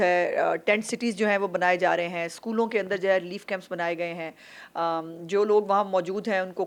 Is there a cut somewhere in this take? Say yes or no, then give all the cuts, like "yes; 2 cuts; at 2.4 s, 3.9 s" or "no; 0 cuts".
no; 0 cuts